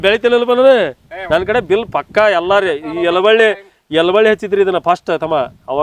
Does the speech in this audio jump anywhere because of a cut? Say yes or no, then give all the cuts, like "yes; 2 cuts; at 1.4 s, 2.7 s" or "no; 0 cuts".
no; 0 cuts